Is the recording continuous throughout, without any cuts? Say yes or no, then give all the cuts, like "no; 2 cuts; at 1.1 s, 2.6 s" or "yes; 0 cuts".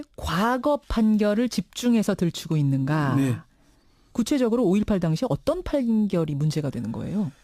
no; 1 cut; at 5.9 s